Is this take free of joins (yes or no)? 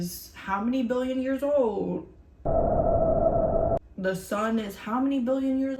yes